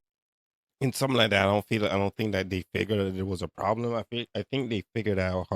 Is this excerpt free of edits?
yes; 0 cuts

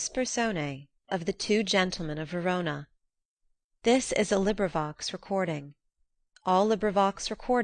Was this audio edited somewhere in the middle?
yes; 1 cut; at 0.9 s

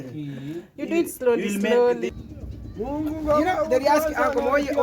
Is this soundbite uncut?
no; 1 cut; at 2.2 s

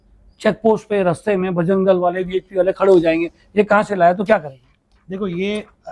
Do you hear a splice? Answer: no; 0 cuts

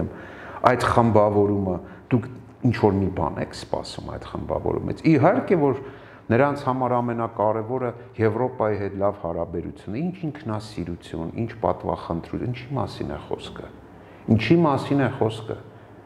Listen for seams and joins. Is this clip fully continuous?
yes; 0 cuts

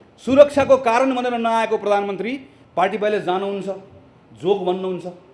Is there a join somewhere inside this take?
yes; 1 cut; at 2.5 s

